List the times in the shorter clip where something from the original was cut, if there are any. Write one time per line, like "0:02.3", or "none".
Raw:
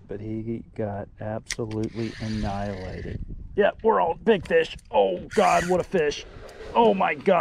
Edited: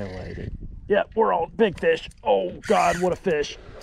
none